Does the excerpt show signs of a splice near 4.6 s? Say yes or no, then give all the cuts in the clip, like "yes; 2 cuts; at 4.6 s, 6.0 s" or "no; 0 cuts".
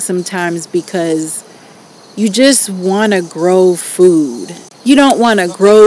yes; 1 cut; at 4.6 s